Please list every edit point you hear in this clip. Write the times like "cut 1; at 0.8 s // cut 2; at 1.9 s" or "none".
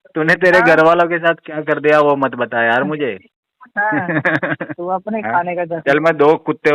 cut 1; at 4.7 s